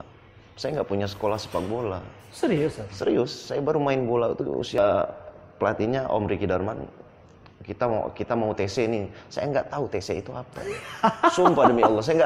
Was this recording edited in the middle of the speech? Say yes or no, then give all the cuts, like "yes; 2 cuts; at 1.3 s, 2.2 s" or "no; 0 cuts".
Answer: yes; 1 cut; at 4.8 s